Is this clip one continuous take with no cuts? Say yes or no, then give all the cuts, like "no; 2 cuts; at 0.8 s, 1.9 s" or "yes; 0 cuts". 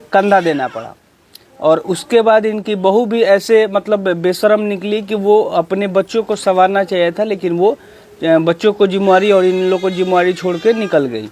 yes; 0 cuts